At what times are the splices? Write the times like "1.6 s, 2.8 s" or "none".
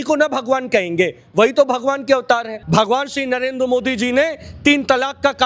2.5 s